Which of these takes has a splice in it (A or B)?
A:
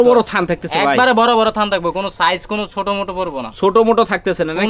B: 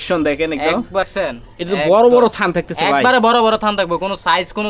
B